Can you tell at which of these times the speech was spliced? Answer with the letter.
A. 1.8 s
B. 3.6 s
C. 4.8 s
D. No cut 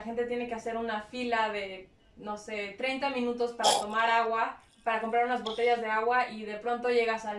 D